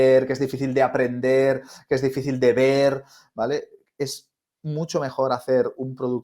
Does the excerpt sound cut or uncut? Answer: uncut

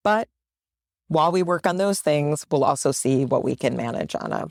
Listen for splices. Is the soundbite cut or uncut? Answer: uncut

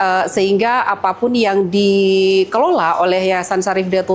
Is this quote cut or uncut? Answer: uncut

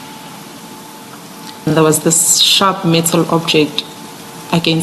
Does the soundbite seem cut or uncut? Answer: cut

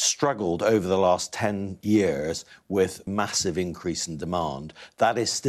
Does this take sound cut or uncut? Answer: cut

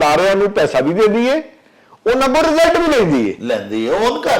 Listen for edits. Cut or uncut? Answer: uncut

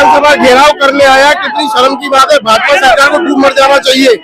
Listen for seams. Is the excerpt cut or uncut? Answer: uncut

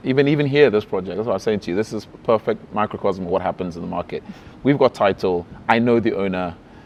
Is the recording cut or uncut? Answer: uncut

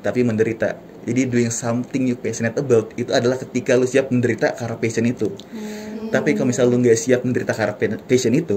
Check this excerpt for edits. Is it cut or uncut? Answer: uncut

